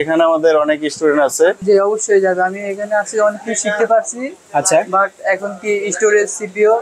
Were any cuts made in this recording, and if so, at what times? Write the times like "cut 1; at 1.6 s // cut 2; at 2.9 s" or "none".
cut 1; at 1.6 s